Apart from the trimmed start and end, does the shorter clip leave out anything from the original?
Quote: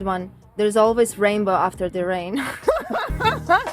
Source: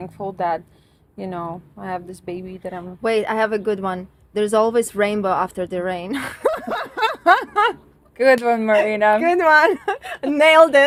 no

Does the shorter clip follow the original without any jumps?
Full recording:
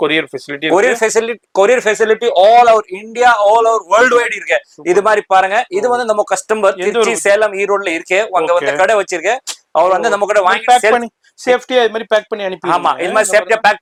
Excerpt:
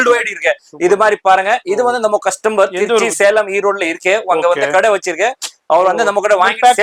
yes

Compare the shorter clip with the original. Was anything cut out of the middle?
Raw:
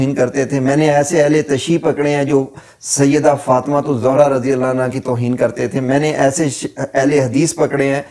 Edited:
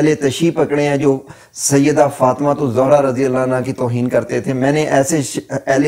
no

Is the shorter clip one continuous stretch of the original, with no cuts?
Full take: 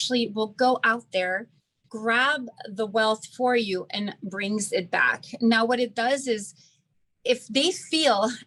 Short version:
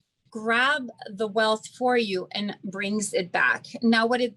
yes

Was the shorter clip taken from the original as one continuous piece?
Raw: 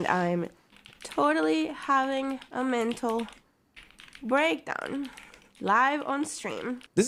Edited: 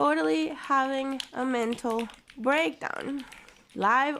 no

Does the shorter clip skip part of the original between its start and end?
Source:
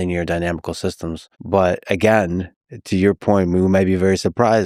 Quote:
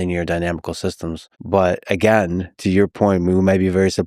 yes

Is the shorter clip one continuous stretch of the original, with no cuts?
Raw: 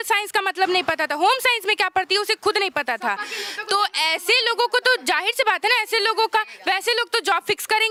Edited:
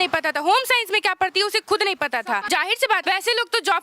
no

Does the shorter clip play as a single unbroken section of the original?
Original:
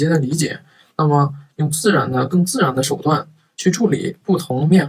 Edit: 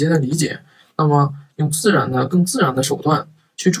yes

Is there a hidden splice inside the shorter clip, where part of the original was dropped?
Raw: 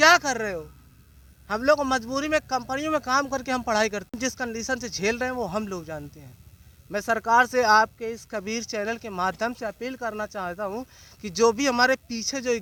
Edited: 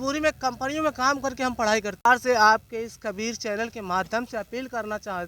yes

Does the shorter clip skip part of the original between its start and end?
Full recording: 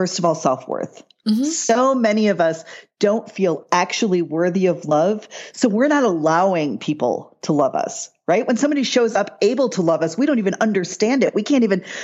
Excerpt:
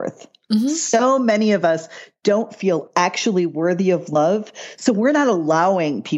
no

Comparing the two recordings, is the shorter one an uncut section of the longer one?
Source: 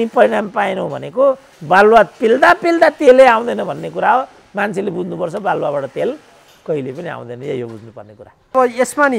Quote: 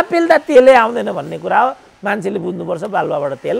yes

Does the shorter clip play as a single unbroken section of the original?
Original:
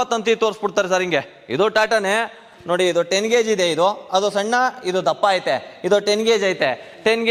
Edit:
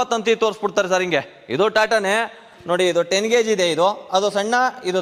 yes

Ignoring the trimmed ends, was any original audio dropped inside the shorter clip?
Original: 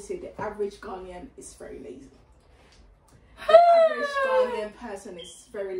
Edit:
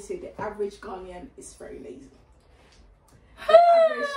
no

